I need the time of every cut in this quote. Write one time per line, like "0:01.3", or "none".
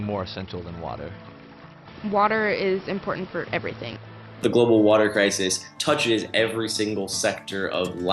0:04.4